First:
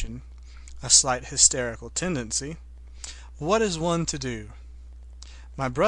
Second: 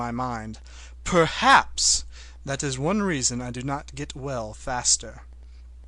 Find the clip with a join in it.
second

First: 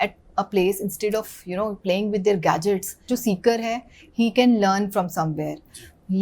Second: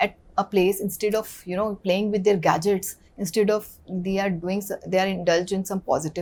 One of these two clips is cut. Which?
first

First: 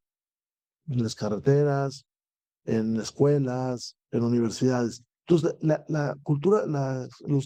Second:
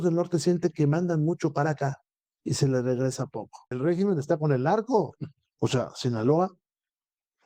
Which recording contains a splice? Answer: second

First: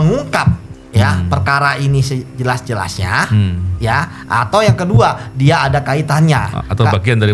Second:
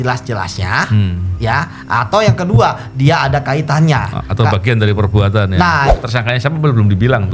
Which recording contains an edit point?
second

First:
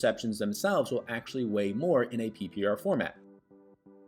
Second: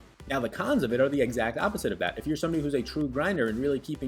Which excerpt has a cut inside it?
first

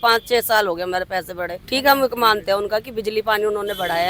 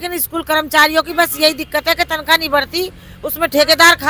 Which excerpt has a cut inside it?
first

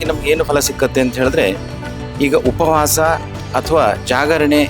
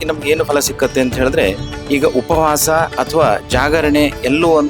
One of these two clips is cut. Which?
second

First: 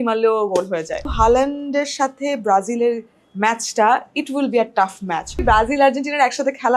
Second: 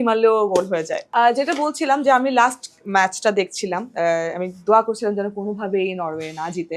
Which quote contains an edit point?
first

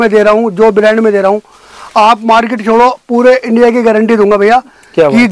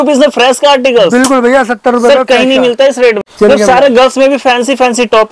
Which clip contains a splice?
second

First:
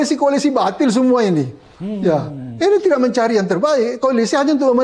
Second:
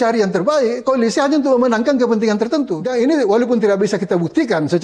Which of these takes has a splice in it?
second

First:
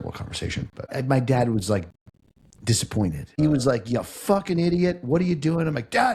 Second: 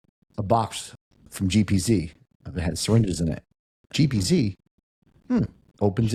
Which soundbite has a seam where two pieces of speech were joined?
first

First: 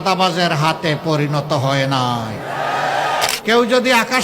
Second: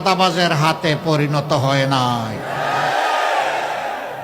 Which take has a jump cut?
first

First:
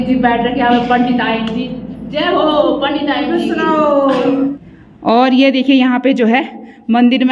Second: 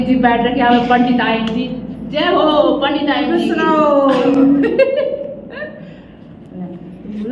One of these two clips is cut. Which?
first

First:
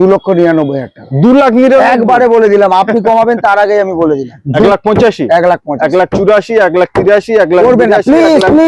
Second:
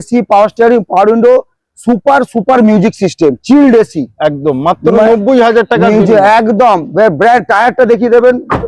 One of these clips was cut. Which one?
first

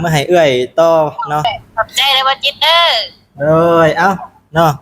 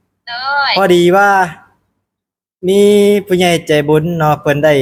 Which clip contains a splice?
first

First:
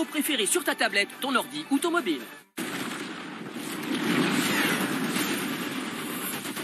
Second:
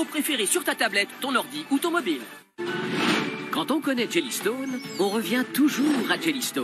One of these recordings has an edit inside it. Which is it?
second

